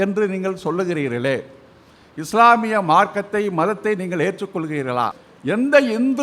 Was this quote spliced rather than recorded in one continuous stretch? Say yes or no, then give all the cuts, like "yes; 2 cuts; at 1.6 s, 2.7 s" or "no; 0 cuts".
yes; 1 cut; at 5.2 s